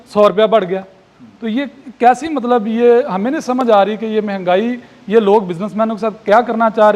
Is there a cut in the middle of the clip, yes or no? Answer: no